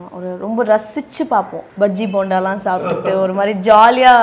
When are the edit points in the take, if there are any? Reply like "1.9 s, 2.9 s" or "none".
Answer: 1.6 s